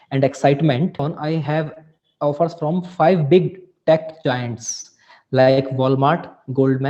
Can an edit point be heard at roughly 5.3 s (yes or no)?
no